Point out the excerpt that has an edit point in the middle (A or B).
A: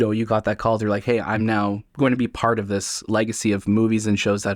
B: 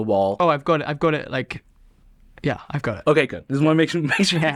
A